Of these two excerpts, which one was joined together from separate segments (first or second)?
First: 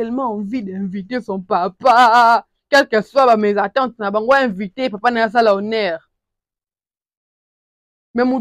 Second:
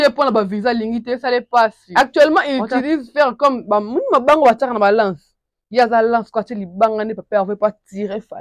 second